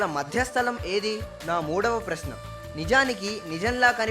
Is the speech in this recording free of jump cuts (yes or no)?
no